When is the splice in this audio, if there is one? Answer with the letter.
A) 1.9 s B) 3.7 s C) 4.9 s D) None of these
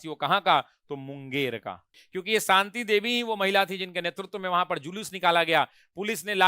A